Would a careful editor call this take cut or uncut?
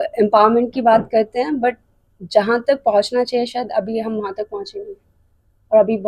uncut